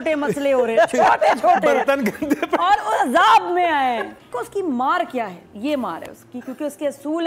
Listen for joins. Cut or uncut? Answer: cut